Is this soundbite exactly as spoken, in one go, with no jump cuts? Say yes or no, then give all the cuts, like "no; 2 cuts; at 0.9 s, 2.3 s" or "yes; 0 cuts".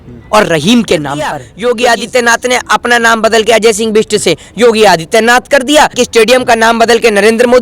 no; 2 cuts; at 1.4 s, 5.9 s